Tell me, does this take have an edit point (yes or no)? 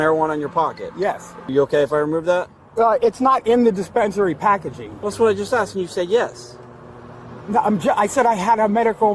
yes